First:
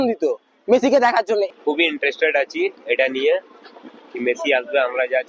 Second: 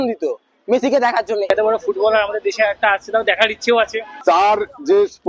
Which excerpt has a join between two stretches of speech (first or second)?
second